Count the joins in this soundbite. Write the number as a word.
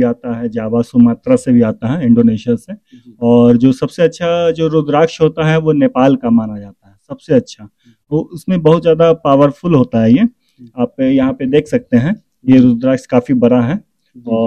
zero